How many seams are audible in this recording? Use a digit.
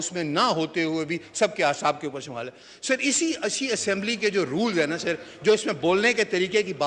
0